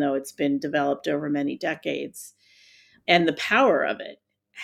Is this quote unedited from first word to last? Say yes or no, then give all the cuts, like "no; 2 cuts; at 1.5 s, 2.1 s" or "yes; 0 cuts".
no; 1 cut; at 3.0 s